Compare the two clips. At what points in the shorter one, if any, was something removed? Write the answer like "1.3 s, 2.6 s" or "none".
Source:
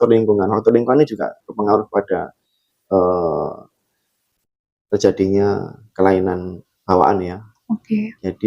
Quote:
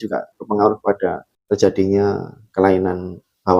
1.3 s